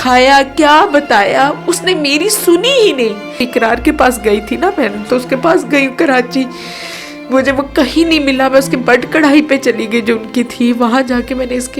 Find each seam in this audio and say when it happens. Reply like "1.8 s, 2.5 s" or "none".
3.4 s

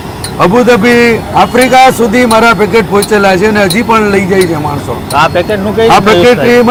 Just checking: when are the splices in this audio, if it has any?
none

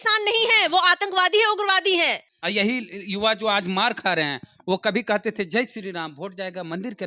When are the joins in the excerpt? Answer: 2.3 s

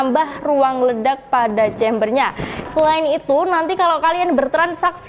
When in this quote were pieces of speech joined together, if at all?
2.7 s

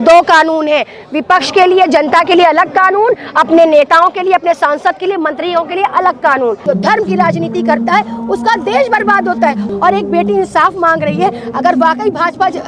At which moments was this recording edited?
6.6 s, 9.6 s

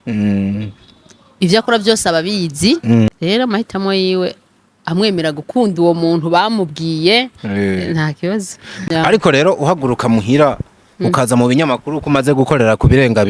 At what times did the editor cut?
3.1 s, 8.8 s

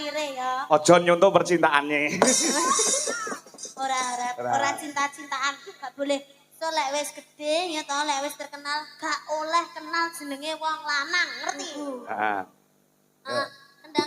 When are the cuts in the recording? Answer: 11.7 s

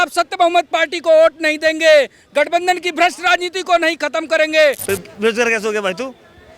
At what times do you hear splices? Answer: 4.8 s

